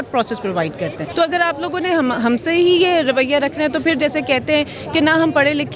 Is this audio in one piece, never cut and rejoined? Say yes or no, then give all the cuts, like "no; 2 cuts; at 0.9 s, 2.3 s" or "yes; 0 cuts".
no; 1 cut; at 1.0 s